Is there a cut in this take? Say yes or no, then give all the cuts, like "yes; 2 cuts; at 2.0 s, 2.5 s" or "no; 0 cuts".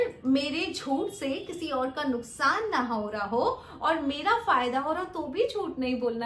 no; 0 cuts